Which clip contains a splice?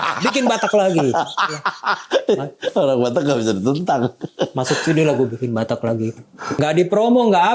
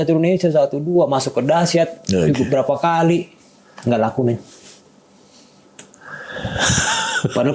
first; 1 cut; at 6.5 s

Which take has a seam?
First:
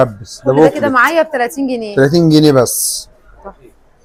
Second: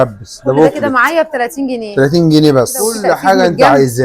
second; 1 cut; at 3.0 s

